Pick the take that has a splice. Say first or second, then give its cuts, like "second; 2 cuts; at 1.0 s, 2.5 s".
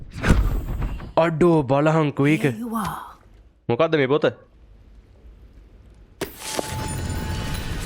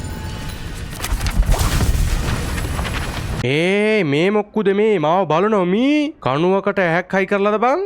second; 1 cut; at 3.4 s